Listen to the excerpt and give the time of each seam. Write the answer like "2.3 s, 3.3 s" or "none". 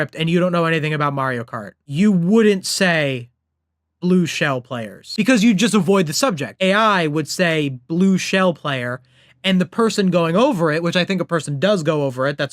5.0 s, 6.5 s